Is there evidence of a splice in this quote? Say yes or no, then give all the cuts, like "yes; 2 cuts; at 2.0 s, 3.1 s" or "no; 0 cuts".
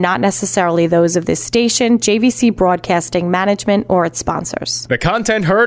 yes; 1 cut; at 4.7 s